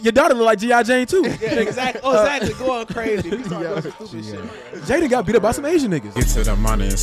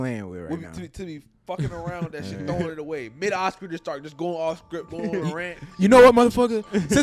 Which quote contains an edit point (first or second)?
first